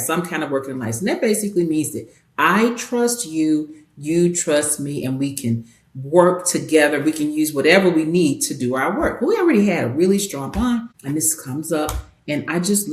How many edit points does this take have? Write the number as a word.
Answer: one